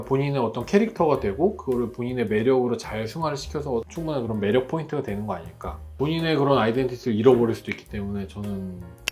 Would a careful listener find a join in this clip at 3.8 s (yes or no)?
yes